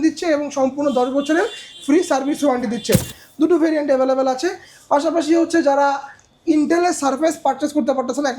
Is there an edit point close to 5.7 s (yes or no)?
no